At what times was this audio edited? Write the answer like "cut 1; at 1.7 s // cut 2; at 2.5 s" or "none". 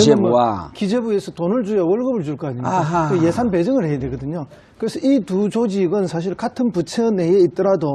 none